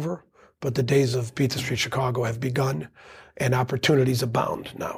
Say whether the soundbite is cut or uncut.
uncut